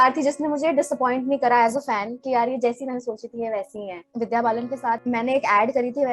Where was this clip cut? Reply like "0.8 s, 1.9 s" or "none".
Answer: 4.0 s, 5.0 s